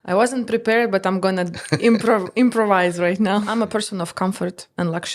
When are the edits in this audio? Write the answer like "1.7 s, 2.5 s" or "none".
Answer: 3.5 s